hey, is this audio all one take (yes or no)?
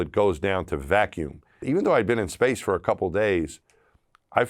no